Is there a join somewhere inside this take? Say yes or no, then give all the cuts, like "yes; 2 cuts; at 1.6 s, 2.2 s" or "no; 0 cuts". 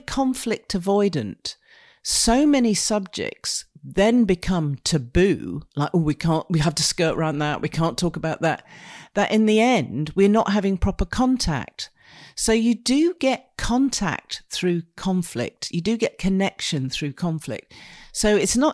no; 0 cuts